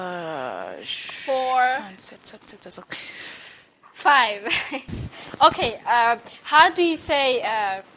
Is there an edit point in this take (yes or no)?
yes